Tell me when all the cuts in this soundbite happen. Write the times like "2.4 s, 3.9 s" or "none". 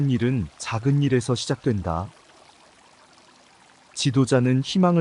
2.5 s, 4.0 s